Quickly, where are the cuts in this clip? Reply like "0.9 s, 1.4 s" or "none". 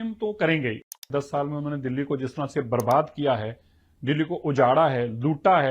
1.0 s